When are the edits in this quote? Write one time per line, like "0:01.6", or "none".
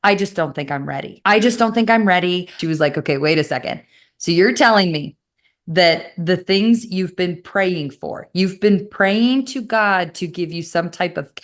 0:02.5